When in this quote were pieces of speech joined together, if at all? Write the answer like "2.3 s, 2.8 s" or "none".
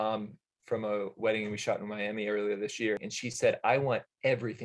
3.1 s